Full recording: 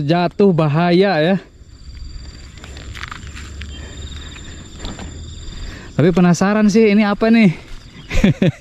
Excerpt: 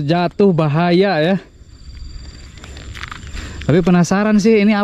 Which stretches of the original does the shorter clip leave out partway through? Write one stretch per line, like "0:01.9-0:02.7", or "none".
0:03.4-0:05.7